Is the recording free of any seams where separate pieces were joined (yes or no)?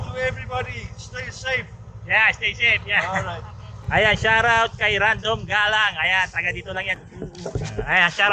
no